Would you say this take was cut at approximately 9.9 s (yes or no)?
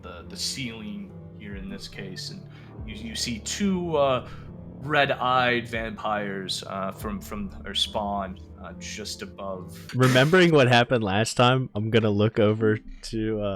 yes